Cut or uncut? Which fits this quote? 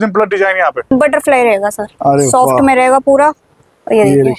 cut